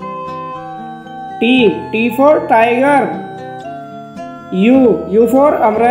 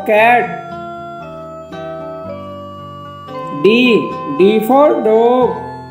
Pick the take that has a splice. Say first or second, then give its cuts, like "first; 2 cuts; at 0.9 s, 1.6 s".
first; 2 cuts; at 3.2 s, 4.5 s